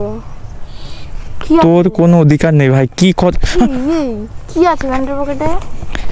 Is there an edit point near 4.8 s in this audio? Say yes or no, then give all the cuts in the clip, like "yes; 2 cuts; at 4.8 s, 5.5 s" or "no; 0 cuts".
no; 0 cuts